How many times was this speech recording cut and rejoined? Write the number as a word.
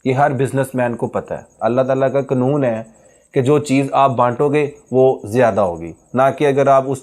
one